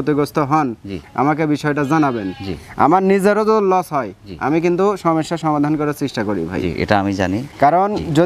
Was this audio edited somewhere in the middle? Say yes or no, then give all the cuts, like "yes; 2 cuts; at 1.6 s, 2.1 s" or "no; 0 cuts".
no; 0 cuts